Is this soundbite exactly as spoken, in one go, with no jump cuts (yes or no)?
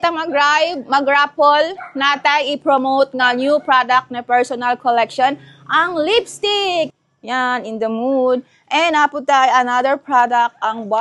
no